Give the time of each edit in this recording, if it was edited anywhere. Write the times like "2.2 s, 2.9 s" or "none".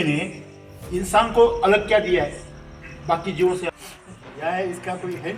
3.7 s